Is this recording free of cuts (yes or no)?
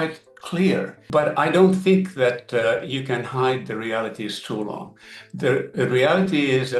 yes